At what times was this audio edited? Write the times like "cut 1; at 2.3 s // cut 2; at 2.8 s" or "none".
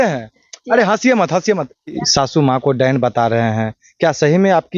cut 1; at 2.0 s